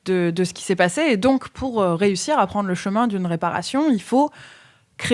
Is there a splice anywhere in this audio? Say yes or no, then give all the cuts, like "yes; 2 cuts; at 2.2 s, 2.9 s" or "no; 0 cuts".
yes; 1 cut; at 1.5 s